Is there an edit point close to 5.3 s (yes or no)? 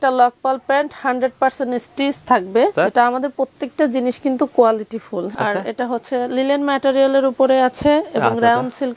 yes